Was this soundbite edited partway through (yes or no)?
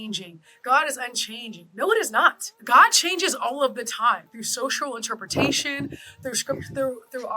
yes